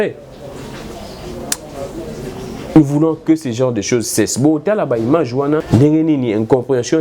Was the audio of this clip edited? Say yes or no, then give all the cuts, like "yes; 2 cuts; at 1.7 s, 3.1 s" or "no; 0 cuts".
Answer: yes; 1 cut; at 5.6 s